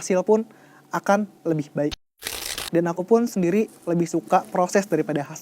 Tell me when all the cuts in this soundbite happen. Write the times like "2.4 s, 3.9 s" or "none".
2.0 s